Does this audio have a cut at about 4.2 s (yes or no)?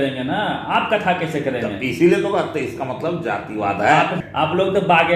yes